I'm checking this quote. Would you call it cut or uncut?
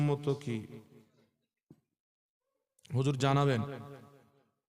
uncut